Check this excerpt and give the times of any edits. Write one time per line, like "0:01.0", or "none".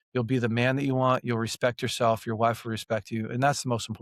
none